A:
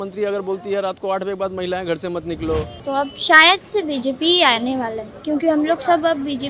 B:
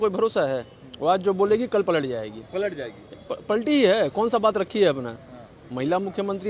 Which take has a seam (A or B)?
A